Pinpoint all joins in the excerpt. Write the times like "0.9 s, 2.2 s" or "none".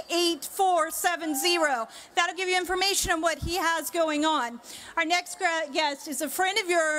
none